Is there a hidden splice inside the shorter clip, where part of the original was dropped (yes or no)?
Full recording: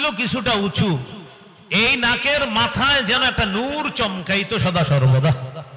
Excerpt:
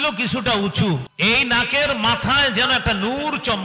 yes